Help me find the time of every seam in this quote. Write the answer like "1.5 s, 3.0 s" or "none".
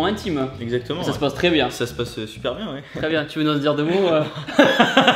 none